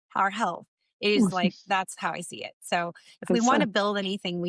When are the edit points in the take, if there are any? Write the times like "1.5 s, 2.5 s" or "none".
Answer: none